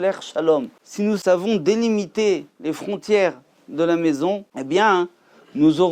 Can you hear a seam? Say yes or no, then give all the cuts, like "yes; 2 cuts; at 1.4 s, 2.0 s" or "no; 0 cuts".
yes; 1 cut; at 1.2 s